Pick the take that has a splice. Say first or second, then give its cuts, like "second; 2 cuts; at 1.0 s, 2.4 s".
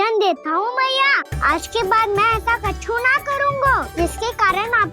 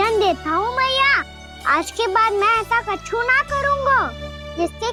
first; 2 cuts; at 1.3 s, 3.9 s